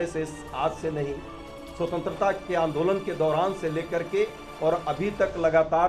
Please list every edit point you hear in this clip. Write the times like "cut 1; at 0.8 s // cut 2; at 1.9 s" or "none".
none